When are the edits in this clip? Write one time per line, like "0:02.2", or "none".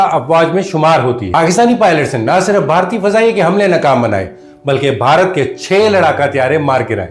0:01.2